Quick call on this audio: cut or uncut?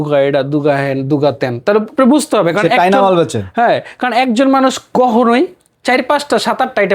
uncut